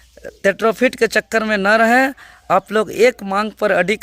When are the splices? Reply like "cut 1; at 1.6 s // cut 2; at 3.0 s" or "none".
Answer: none